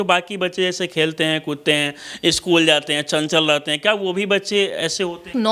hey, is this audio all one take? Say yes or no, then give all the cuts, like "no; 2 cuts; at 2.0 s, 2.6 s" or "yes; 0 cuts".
yes; 0 cuts